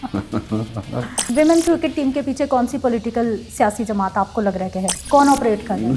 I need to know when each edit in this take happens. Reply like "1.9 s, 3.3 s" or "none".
1.2 s, 5.0 s